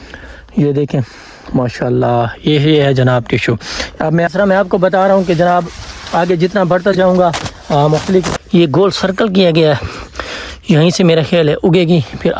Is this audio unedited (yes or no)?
no